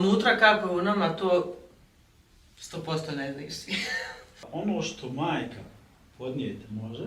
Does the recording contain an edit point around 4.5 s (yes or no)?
yes